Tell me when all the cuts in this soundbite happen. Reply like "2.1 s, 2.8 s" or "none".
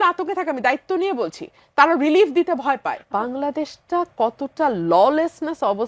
3.0 s